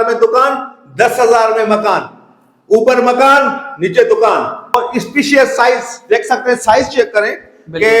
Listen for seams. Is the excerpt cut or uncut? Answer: cut